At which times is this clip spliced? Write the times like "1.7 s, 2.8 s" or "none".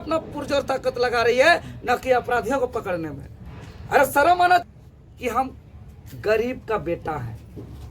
4.6 s